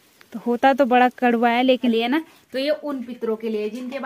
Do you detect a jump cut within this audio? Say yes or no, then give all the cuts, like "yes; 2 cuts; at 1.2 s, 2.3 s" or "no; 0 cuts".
yes; 1 cut; at 1.9 s